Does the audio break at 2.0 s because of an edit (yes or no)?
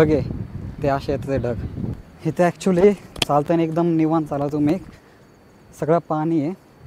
yes